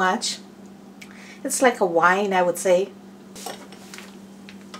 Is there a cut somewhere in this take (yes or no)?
yes